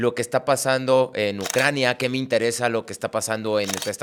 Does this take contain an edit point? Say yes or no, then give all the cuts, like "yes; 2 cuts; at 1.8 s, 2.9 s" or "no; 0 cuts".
no; 0 cuts